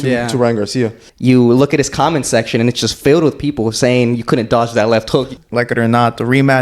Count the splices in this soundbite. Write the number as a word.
two